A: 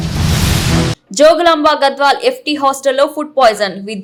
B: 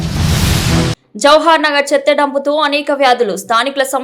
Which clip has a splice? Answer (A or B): B